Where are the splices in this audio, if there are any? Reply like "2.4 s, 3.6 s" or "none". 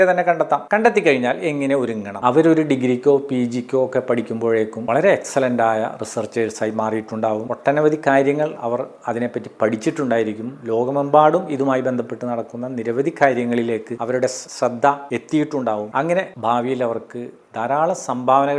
2.1 s